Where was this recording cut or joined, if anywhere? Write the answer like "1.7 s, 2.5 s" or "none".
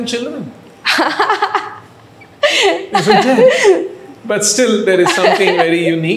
none